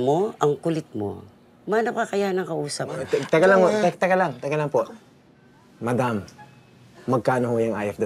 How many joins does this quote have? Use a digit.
1